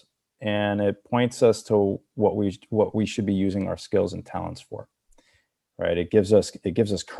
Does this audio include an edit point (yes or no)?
no